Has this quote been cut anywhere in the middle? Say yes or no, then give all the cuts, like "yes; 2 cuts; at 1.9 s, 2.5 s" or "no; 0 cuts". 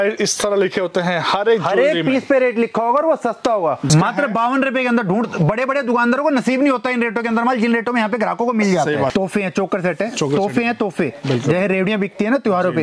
yes; 2 cuts; at 3.9 s, 9.1 s